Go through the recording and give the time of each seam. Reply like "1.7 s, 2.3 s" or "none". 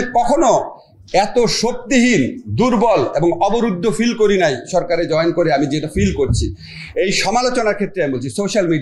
none